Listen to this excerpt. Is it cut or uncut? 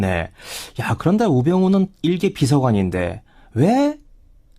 uncut